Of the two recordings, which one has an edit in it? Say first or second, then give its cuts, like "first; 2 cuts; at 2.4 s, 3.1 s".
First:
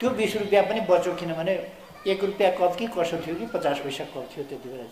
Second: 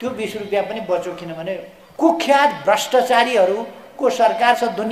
second; 1 cut; at 1.8 s